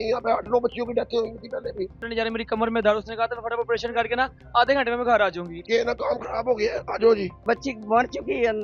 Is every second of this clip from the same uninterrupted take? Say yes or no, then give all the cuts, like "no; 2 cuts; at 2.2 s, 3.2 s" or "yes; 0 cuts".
no; 3 cuts; at 2.0 s, 5.5 s, 7.4 s